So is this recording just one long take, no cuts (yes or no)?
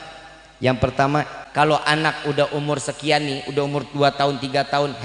no